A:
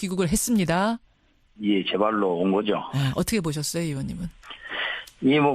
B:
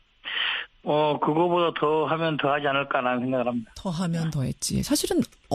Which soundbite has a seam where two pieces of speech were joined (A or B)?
A